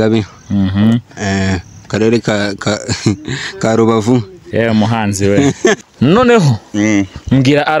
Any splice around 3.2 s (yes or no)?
no